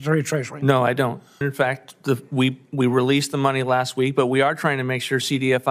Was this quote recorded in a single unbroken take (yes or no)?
no